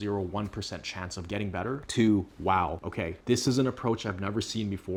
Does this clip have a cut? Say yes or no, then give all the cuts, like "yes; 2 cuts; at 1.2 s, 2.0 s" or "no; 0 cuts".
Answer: no; 0 cuts